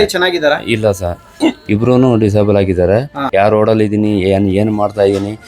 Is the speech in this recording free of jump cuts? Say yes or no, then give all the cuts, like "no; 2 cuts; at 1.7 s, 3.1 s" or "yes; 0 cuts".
no; 1 cut; at 3.3 s